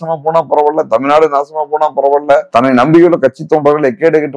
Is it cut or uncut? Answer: cut